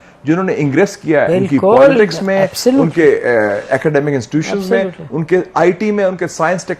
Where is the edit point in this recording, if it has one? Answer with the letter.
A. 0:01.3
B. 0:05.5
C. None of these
A